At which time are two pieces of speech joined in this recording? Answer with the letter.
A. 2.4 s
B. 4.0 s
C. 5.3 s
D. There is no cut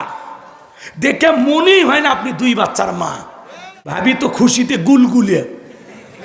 B